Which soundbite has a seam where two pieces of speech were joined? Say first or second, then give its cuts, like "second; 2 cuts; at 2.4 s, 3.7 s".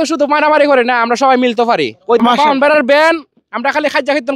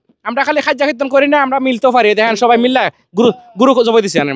first; 1 cut; at 2.2 s